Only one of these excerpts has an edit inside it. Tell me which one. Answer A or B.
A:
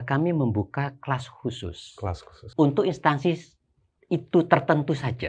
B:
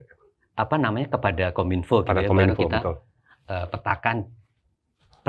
A